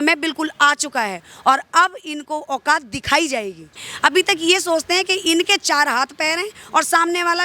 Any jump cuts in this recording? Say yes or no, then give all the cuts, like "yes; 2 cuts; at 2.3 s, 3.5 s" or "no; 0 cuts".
yes; 1 cut; at 3.9 s